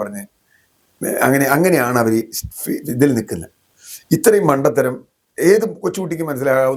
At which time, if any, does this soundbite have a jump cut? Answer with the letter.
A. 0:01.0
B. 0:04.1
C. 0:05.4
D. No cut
D